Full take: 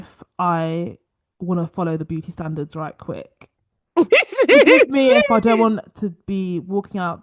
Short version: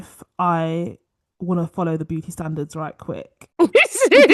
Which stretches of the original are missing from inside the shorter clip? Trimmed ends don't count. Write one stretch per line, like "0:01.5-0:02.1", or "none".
0:03.4-0:03.7